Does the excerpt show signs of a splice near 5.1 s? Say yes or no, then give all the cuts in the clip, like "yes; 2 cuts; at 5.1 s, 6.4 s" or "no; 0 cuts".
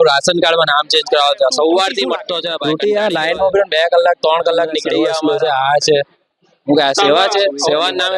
yes; 2 cuts; at 2.5 s, 5.1 s